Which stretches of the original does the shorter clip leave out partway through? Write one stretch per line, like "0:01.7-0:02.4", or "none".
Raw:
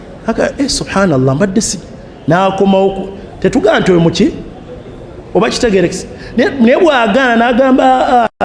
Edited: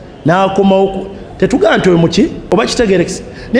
0:04.4-0:05.2